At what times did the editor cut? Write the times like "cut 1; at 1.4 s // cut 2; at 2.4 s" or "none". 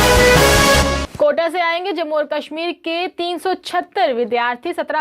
cut 1; at 1.0 s